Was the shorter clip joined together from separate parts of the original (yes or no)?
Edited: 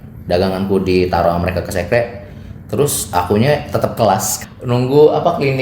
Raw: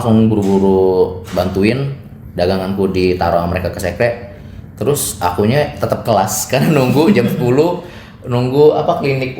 yes